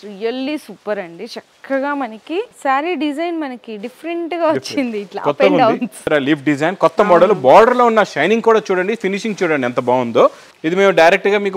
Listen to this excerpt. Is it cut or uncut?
cut